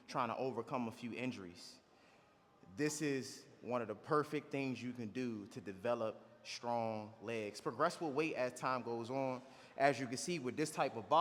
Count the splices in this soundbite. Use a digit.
0